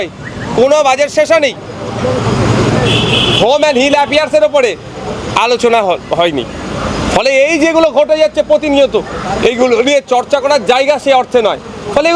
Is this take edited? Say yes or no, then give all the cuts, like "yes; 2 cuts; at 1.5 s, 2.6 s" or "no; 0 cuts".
no; 0 cuts